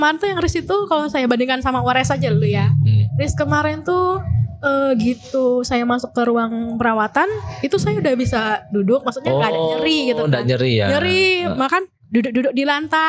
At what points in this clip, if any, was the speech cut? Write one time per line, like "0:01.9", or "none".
none

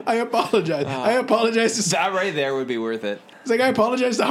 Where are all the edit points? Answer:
0:03.3

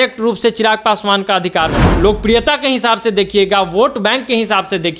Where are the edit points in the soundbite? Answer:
0:01.8

